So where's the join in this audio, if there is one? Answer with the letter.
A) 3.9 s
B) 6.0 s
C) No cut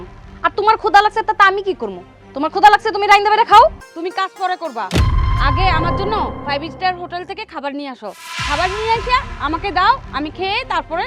A